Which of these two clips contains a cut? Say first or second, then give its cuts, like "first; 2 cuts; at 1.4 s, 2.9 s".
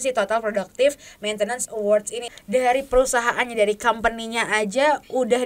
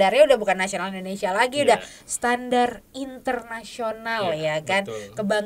first; 1 cut; at 2.4 s